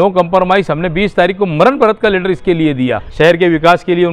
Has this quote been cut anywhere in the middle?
yes; 1 cut; at 3.0 s

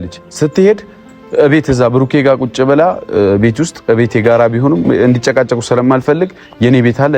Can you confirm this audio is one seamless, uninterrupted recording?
no; 1 cut; at 1.1 s

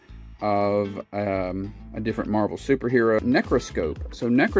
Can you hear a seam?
yes; 1 cut; at 3.2 s

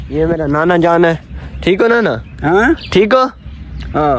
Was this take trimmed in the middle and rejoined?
no; 0 cuts

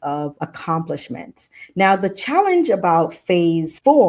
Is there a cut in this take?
no; 0 cuts

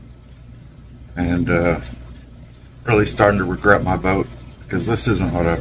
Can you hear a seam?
no; 0 cuts

